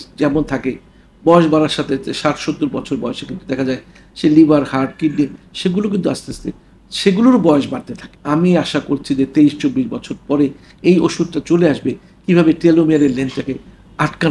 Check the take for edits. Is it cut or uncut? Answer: cut